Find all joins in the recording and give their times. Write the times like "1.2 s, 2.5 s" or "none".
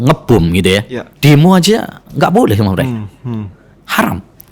1.0 s